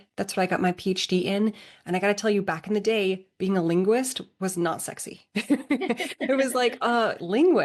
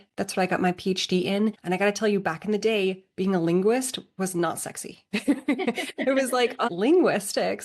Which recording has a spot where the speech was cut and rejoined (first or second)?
second